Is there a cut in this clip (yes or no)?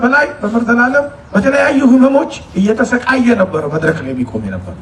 no